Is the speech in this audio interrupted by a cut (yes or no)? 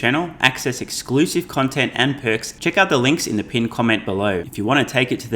yes